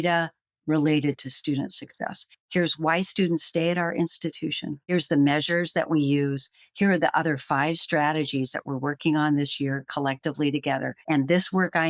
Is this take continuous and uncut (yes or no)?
no